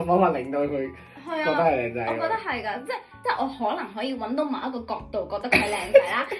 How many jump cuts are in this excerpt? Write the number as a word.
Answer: one